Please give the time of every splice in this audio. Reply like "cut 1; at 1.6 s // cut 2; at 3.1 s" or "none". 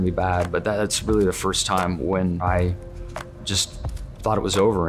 cut 1; at 2.4 s